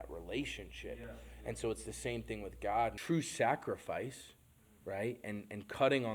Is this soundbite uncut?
no; 1 cut; at 3.0 s

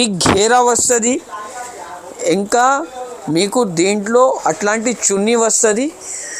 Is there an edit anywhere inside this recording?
no; 0 cuts

